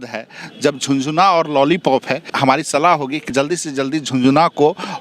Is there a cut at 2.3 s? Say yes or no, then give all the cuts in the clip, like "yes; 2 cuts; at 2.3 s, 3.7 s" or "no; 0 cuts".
yes; 2 cuts; at 2.3 s, 3.3 s